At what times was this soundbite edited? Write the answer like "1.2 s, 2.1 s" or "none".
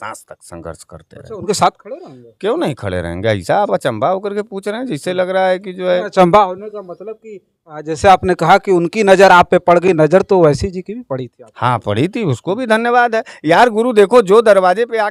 none